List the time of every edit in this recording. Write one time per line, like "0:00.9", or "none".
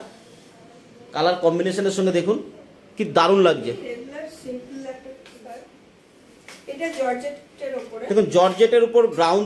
none